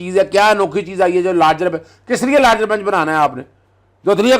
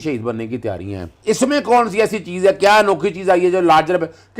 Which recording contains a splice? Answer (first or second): second